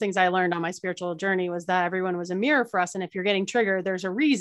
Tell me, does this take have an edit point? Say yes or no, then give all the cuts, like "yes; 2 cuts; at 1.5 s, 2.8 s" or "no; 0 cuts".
no; 0 cuts